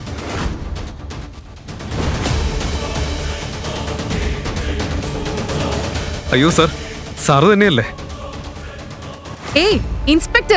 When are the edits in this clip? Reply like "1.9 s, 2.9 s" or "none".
6.1 s